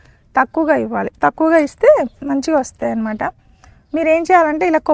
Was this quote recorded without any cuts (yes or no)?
yes